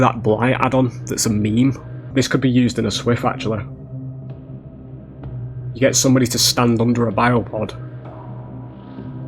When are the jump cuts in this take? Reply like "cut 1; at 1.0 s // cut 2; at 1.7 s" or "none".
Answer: cut 1; at 2.1 s